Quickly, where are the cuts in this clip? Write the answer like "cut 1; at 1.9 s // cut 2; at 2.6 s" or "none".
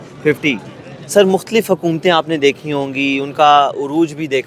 none